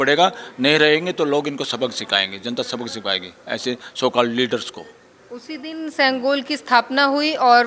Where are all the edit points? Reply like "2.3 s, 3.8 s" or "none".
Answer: none